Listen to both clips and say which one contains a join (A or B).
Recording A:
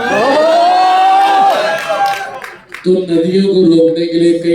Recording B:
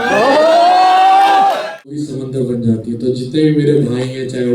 B